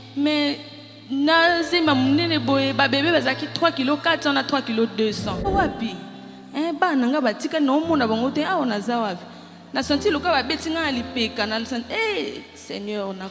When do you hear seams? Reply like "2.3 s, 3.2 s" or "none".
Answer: 5.5 s

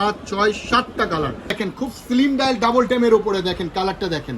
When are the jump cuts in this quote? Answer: 1.6 s

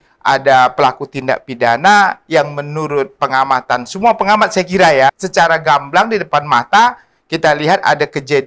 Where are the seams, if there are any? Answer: 5.2 s

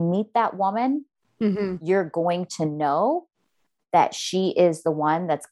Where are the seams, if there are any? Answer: none

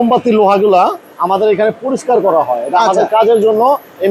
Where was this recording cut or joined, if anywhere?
none

